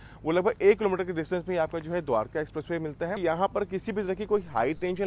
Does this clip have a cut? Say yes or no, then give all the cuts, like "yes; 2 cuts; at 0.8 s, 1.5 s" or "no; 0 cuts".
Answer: yes; 1 cut; at 3.2 s